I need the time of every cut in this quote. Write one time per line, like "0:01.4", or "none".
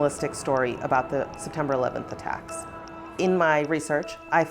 0:02.8